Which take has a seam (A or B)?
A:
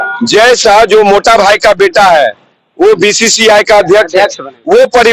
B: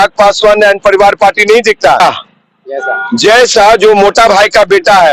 B